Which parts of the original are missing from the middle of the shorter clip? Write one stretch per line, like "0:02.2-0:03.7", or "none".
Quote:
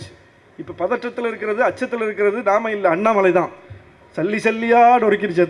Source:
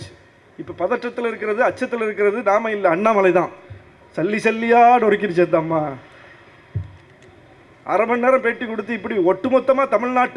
none